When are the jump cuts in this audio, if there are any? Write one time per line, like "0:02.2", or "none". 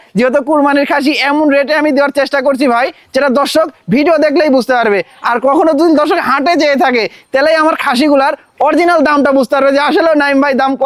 none